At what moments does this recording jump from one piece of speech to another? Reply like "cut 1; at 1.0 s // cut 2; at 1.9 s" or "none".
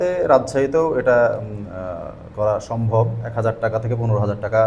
cut 1; at 3.2 s